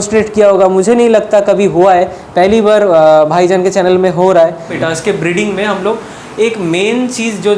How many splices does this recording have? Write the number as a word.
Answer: one